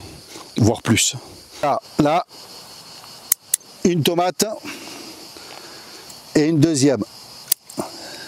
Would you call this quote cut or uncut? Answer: cut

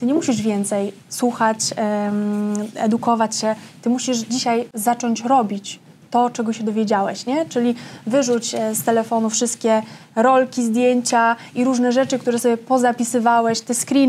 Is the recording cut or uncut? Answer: uncut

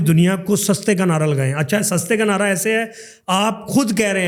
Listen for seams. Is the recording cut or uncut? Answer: uncut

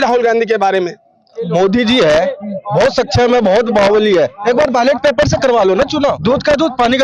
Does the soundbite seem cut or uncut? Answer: cut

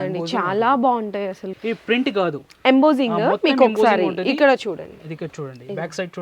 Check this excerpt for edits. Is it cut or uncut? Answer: cut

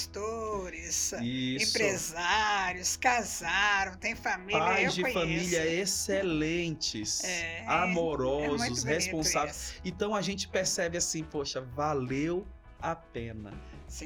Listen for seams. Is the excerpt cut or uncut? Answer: uncut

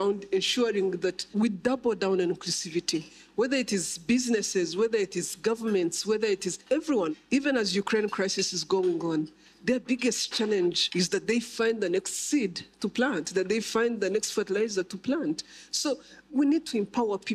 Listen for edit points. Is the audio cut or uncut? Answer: cut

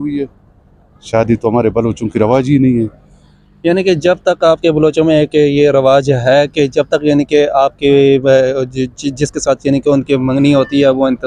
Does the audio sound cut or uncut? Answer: uncut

